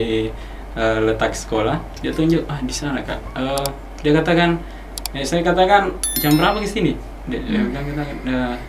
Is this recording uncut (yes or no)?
yes